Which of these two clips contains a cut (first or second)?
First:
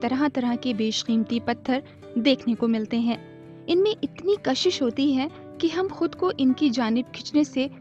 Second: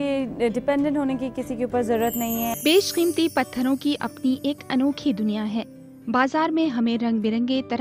second